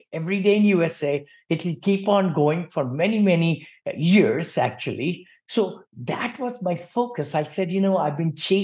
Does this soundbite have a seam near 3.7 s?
no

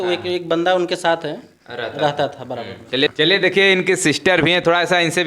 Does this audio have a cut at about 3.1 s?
yes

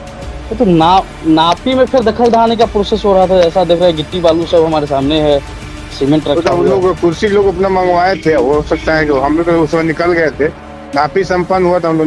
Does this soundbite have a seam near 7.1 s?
no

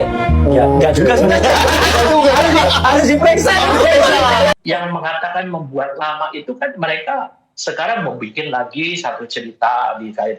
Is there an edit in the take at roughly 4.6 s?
yes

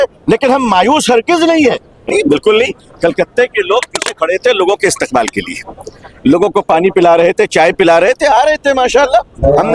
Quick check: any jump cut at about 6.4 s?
no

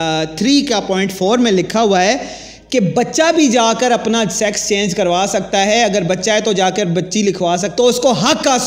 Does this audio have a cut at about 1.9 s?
no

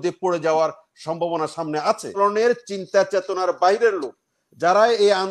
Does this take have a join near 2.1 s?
yes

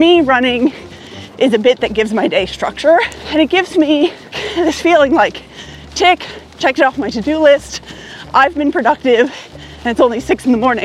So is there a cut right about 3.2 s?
yes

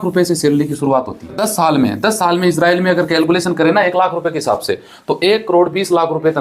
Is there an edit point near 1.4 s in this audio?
yes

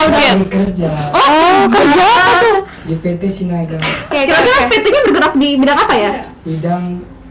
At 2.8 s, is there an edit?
no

